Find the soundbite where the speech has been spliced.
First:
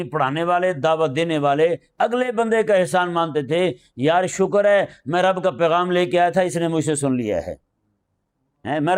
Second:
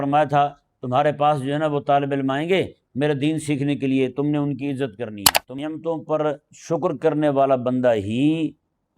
second; 1 cut; at 5.5 s

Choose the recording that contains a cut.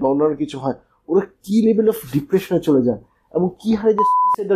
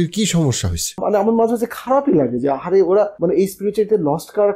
second; 2 cuts; at 1.0 s, 3.1 s

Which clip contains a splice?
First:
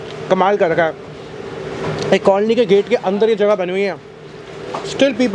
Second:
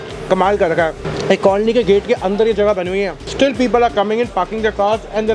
second; 2 cuts; at 1.1 s, 3.2 s

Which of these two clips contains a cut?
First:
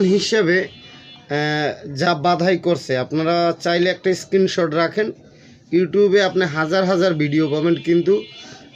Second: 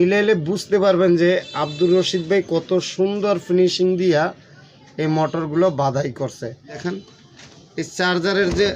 second; 1 cut; at 6.8 s

